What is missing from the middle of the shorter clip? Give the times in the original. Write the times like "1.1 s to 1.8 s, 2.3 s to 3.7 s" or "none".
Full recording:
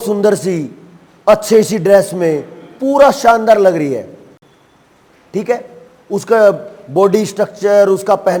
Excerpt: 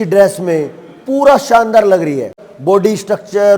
4.2 s to 6.7 s

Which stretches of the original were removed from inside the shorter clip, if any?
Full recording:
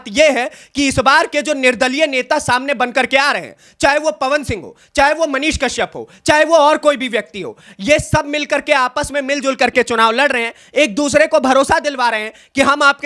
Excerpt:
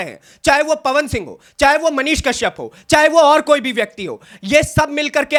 none

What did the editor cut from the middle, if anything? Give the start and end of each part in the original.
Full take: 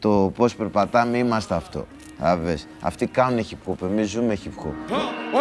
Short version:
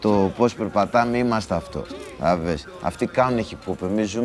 none

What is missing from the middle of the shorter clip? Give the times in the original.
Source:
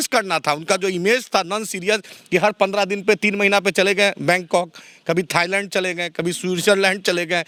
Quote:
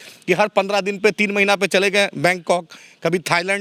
none

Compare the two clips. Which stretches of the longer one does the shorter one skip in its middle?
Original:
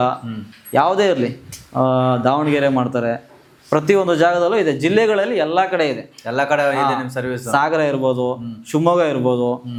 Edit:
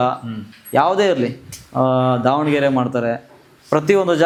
none

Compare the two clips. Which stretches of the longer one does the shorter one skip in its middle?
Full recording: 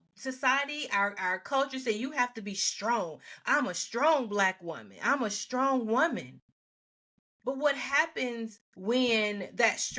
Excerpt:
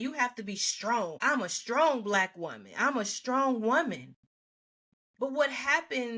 3.1 s to 3.4 s

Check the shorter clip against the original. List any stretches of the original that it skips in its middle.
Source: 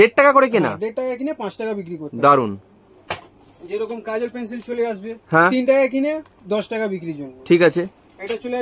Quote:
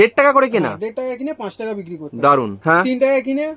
2.6 s to 5.2 s

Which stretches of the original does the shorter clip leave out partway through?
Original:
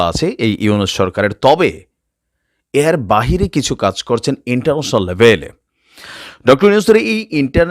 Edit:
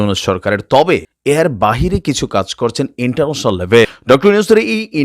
1.8 s to 2.6 s, 5.4 s to 6.3 s

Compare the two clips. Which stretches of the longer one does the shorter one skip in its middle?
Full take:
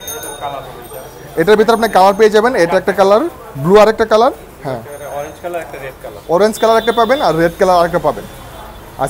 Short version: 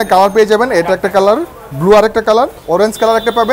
4.4 s to 6.2 s

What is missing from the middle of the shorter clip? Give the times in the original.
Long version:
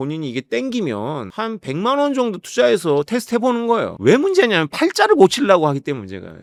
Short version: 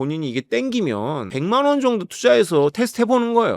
1.3 s to 1.6 s

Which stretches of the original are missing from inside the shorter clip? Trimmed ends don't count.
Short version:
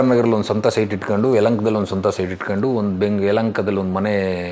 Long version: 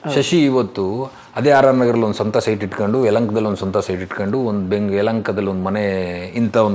none

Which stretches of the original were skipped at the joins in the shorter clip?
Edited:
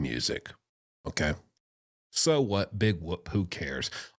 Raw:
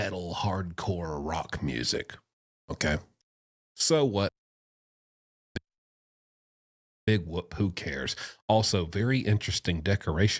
4.4 s to 7.0 s

